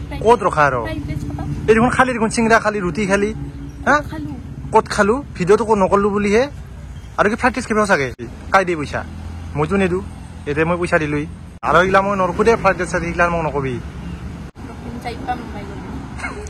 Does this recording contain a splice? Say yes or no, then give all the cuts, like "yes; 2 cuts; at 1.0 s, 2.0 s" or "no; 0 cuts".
no; 0 cuts